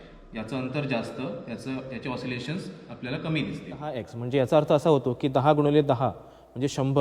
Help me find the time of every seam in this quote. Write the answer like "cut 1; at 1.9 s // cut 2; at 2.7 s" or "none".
cut 1; at 4.1 s